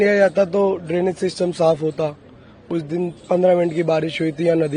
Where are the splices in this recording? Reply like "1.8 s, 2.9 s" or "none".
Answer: none